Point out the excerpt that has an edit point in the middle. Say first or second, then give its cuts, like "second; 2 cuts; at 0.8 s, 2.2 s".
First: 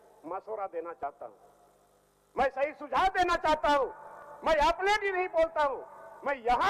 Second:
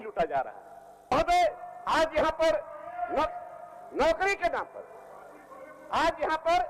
second; 1 cut; at 1.1 s